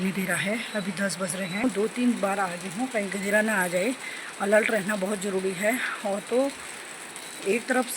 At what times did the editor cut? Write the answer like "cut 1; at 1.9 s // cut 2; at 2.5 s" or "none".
cut 1; at 1.6 s